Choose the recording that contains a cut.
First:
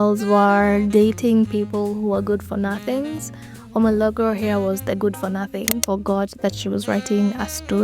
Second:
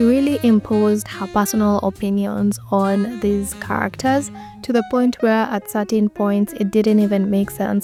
first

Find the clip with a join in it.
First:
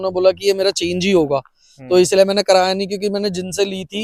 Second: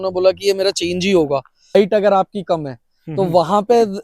second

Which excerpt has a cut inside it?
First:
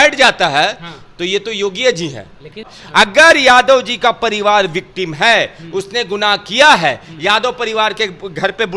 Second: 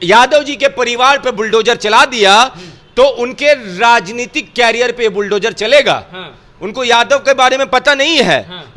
first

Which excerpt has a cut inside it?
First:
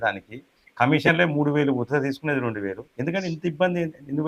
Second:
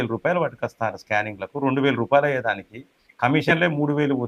first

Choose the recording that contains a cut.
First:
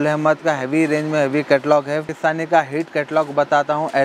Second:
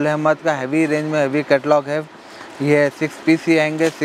first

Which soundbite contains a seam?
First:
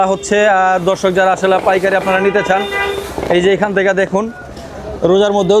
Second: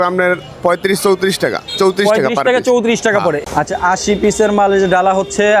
second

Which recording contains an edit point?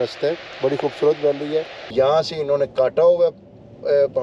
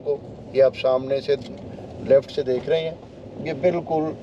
first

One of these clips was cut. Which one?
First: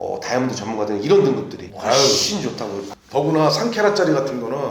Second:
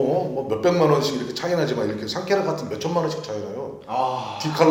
first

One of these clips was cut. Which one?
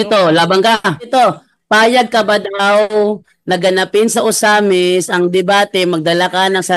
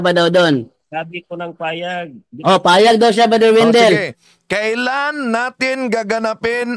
first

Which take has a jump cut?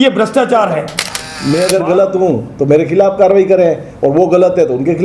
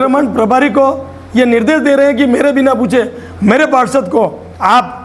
first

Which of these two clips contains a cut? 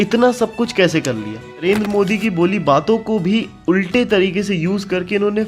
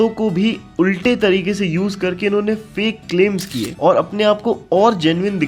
first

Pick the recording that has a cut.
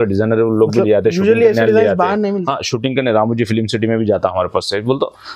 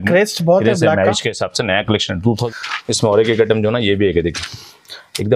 second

